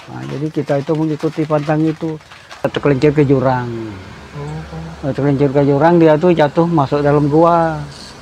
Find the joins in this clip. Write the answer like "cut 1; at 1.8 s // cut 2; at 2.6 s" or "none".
cut 1; at 2.7 s